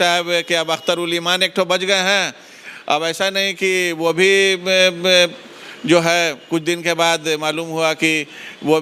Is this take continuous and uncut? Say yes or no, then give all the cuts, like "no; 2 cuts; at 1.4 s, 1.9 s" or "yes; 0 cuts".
yes; 0 cuts